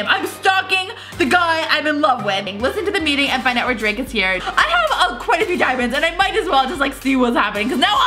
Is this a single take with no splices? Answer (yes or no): no